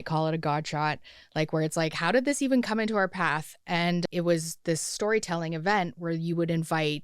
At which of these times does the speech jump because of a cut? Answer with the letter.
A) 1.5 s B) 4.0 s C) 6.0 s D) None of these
B